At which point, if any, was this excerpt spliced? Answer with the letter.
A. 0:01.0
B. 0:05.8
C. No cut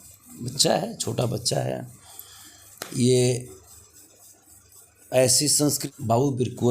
B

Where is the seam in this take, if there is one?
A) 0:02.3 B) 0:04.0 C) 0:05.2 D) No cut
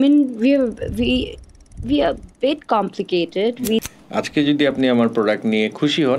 B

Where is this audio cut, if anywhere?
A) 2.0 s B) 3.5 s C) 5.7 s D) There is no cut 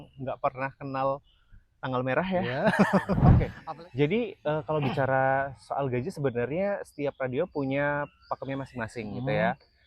B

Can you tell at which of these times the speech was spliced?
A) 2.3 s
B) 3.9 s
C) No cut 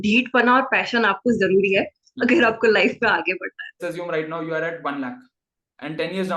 B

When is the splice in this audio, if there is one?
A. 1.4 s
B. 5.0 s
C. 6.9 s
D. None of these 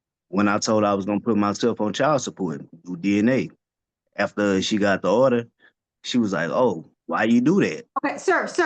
C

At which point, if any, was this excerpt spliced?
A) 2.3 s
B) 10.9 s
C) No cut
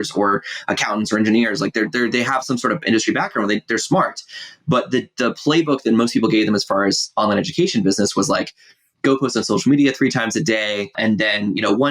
B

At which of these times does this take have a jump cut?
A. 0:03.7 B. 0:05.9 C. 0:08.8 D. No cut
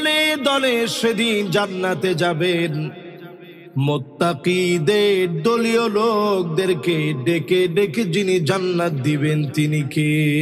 D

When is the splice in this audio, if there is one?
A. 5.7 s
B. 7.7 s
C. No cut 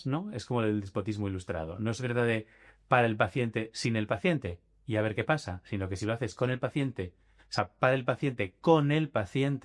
C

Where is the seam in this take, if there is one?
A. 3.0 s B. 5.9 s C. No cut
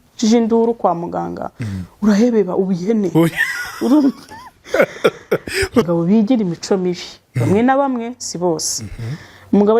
B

